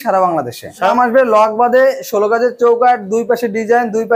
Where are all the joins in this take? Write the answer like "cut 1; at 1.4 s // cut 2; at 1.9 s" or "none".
cut 1; at 0.9 s